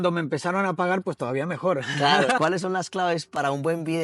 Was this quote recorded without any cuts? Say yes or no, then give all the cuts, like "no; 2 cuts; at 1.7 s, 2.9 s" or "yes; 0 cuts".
no; 1 cut; at 2.4 s